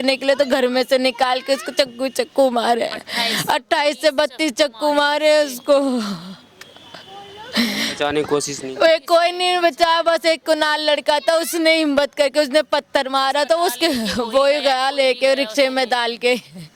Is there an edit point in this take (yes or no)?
no